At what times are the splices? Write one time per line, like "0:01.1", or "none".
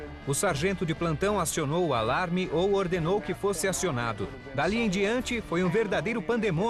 0:03.7